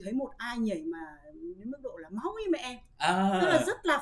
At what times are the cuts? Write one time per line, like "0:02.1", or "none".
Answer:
none